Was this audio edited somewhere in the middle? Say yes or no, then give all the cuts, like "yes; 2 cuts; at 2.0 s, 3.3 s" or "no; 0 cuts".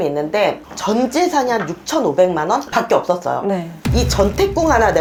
no; 0 cuts